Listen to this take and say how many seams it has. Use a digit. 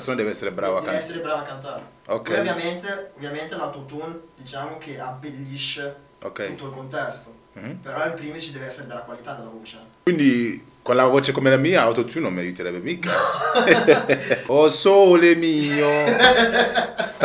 2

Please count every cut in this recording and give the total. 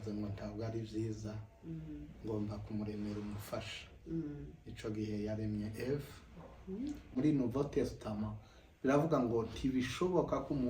1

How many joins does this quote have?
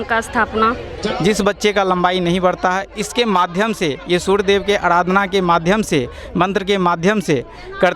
1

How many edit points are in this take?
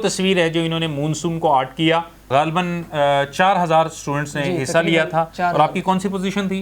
1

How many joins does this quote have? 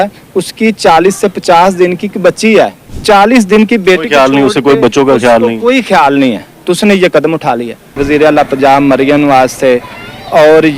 2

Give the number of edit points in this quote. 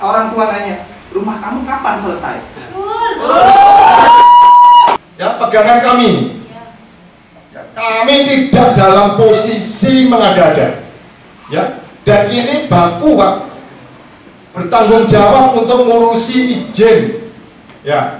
1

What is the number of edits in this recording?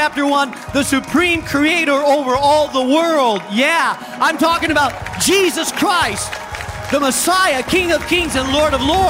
0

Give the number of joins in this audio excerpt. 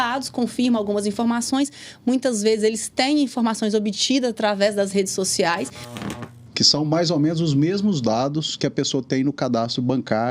1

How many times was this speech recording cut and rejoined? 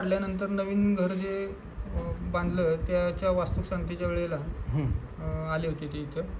0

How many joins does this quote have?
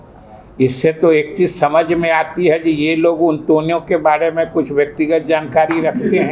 0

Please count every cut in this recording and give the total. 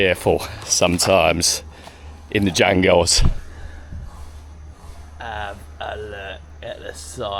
0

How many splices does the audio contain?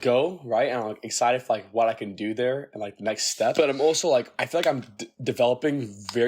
2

